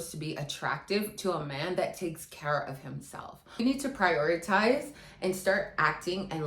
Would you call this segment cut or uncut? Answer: cut